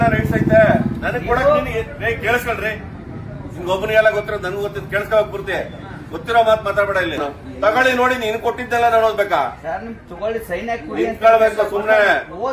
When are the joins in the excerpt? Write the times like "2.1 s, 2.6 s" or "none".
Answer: 7.2 s